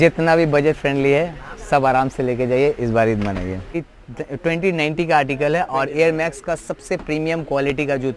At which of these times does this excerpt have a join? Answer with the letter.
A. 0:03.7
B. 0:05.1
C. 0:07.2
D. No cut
A